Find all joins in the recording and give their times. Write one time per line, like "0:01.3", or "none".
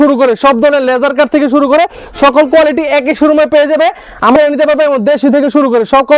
0:04.4